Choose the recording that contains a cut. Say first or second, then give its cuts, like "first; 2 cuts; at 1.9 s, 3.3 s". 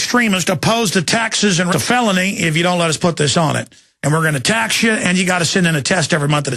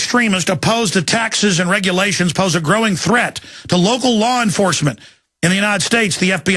second; 1 cut; at 1.7 s